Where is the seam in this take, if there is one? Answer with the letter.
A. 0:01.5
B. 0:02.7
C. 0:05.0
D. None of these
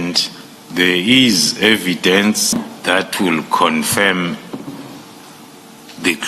B